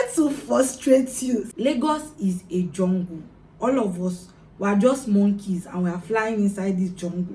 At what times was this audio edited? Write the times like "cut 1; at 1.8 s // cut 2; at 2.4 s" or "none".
cut 1; at 1.5 s